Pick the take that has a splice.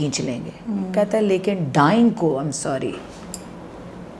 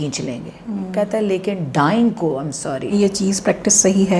second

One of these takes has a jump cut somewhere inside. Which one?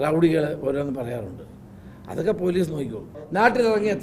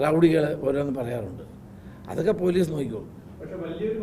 first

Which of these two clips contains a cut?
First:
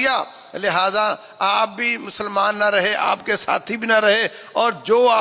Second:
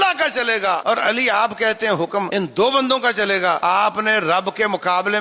second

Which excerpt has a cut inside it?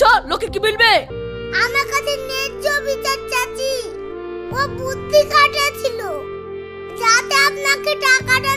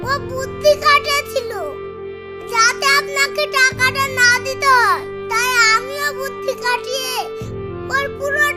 first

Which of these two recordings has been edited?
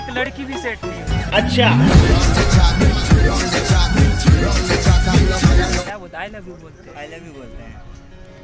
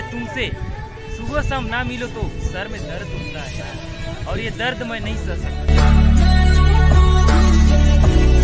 first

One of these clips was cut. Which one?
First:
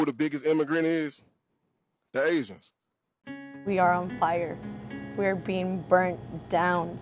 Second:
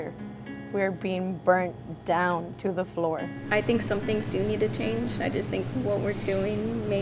first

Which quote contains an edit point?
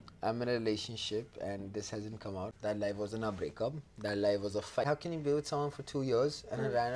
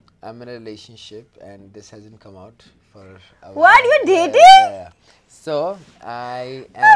first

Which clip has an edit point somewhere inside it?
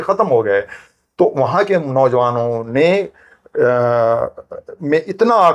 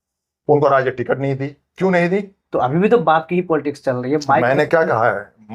second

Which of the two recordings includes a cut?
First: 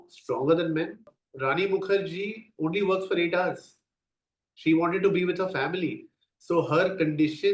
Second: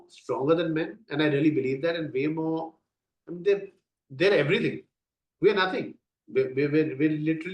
first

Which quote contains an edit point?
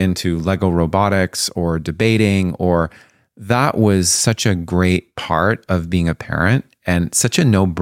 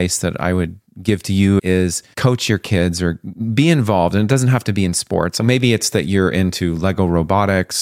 second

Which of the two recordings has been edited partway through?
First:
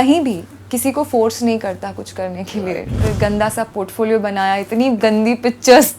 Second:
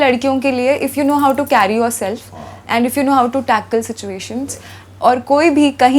first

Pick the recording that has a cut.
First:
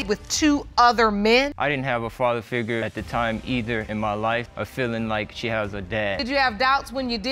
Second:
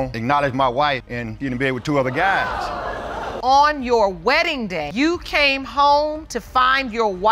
first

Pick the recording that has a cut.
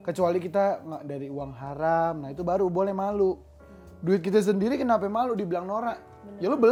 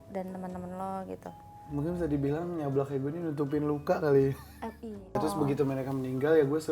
second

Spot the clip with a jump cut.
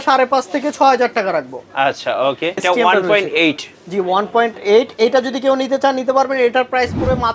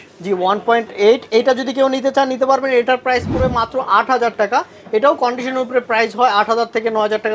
first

